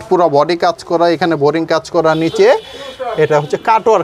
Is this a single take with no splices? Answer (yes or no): yes